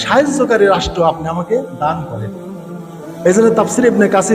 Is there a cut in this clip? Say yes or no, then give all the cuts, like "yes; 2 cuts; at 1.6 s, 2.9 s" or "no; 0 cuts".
yes; 1 cut; at 3.0 s